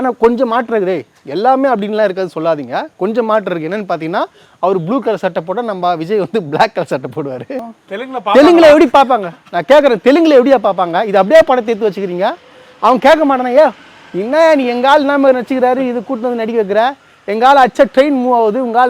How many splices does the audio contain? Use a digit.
1